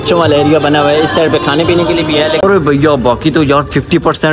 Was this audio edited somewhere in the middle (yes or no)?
yes